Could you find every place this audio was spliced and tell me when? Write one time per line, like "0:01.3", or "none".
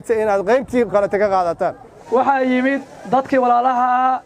0:01.8